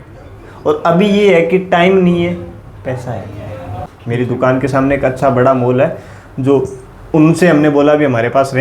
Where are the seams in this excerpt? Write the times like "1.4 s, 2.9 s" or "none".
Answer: 3.7 s